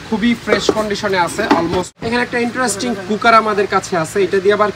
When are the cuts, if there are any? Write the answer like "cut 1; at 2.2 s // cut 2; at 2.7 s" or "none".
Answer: cut 1; at 2.0 s